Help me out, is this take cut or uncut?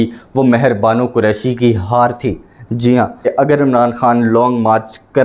cut